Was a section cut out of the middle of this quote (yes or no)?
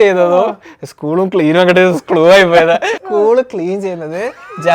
yes